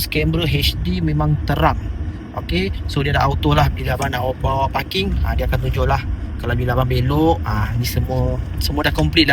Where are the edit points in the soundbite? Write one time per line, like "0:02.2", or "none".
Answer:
none